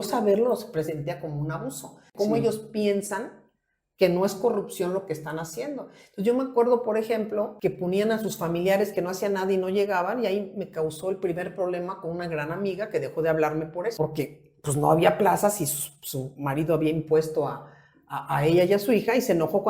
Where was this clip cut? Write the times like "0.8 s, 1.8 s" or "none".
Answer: 2.1 s, 7.5 s, 13.9 s